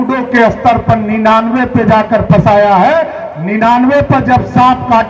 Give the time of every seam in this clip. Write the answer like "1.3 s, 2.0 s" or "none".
none